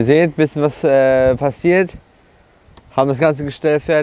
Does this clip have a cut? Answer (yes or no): no